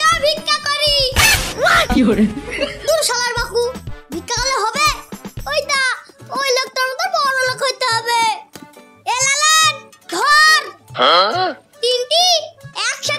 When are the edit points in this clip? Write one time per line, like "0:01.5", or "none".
0:08.6